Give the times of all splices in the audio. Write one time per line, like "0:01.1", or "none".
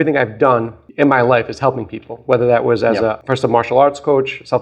0:03.2